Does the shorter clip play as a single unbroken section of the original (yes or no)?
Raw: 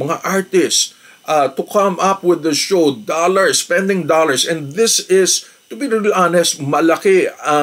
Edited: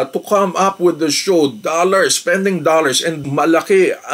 no